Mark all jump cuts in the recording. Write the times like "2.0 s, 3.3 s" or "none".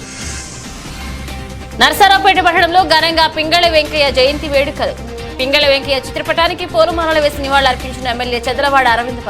1.2 s